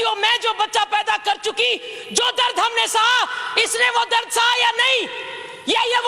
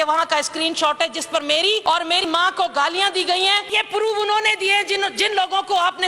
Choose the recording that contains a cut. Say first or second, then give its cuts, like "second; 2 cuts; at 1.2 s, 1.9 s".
second; 2 cuts; at 1.8 s, 3.7 s